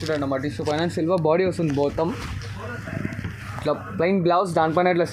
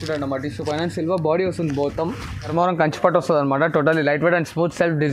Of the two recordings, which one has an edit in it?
second; 1 cut; at 2.5 s

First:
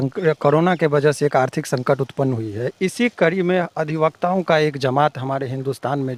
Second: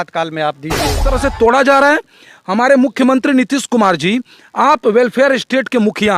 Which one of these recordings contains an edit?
second; 1 cut; at 1.1 s

